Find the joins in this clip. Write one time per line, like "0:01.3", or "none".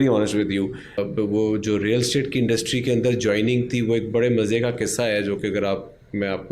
0:01.0